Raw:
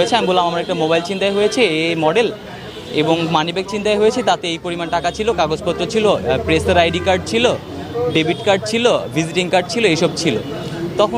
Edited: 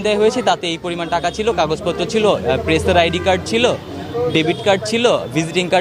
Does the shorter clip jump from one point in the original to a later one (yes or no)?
no